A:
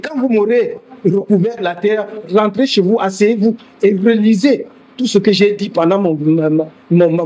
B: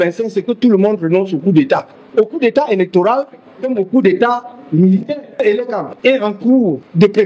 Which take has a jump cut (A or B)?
B